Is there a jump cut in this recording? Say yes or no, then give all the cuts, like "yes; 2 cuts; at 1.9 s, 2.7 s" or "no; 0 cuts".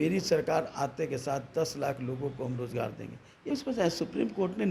yes; 1 cut; at 3.4 s